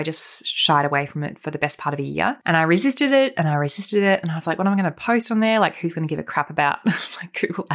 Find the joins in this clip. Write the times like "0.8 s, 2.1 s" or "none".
2.4 s